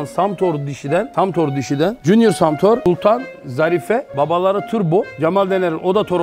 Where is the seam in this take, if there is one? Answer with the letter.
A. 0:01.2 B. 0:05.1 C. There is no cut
B